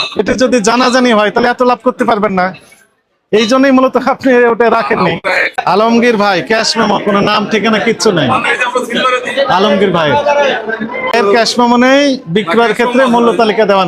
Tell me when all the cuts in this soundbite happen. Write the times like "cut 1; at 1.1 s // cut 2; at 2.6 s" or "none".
cut 1; at 5.5 s // cut 2; at 11.1 s